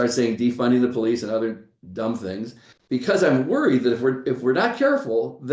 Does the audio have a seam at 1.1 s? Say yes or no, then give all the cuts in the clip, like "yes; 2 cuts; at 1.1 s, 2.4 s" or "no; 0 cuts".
no; 1 cut; at 2.6 s